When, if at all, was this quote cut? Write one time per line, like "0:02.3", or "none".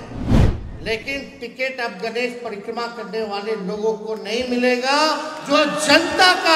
none